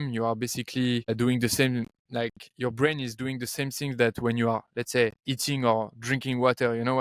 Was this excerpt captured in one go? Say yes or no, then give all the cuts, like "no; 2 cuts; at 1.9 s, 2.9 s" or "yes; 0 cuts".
no; 3 cuts; at 1.1 s, 2.0 s, 5.3 s